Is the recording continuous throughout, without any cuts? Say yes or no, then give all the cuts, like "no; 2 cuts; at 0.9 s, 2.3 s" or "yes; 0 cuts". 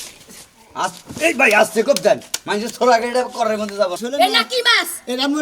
no; 1 cut; at 4.0 s